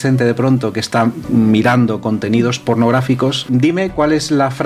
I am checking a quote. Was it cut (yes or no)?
yes